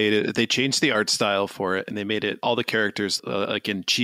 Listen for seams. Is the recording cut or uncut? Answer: uncut